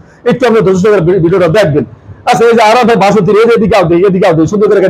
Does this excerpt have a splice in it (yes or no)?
no